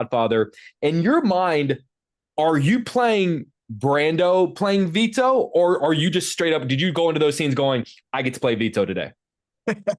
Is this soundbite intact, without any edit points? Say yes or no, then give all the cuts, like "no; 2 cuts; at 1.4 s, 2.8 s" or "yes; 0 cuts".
yes; 0 cuts